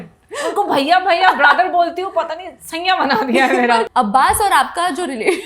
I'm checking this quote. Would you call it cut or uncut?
cut